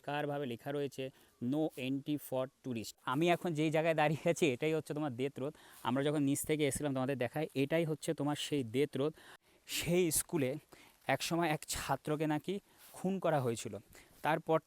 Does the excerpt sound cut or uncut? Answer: cut